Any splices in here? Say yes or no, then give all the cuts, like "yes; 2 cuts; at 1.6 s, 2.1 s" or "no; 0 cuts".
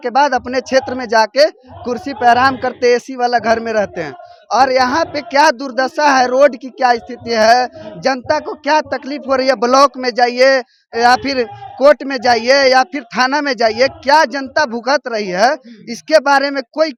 no; 0 cuts